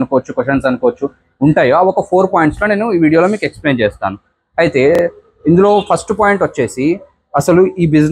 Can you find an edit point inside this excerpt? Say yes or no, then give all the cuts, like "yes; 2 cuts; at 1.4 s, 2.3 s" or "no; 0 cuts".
no; 0 cuts